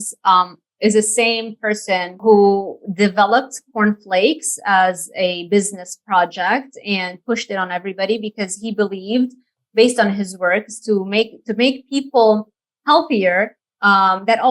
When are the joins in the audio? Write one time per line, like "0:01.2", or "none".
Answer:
0:02.1